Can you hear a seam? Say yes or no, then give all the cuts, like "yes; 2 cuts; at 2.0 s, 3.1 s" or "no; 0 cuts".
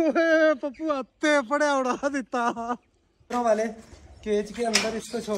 yes; 1 cut; at 3.3 s